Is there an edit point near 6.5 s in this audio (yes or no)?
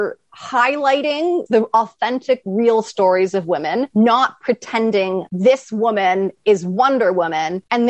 no